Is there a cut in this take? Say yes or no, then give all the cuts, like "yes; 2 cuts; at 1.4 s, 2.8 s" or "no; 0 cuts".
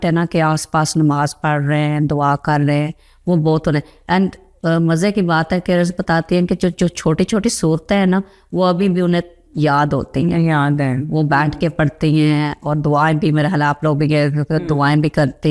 no; 0 cuts